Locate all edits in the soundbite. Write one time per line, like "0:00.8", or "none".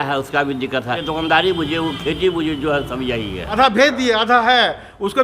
0:01.0
0:03.5